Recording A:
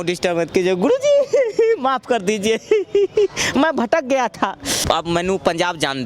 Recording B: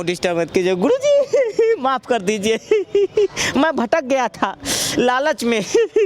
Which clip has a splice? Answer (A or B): A